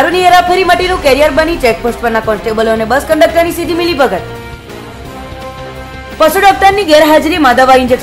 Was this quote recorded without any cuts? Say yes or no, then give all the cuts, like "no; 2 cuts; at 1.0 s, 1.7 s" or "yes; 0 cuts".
yes; 0 cuts